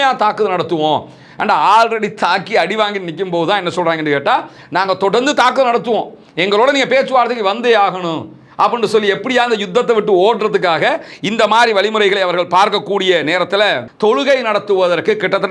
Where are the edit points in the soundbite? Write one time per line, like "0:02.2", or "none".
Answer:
0:13.9